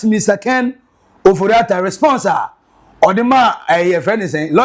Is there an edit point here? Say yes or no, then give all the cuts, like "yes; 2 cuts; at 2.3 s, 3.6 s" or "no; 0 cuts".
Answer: no; 0 cuts